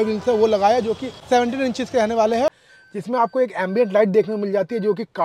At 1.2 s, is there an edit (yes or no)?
yes